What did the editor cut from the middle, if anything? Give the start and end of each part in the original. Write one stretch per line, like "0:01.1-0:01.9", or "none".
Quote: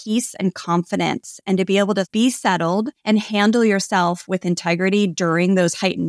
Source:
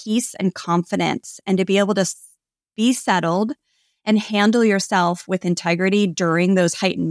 0:02.1-0:02.7
0:03.6-0:04.0